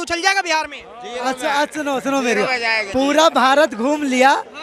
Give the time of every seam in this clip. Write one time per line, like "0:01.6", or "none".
none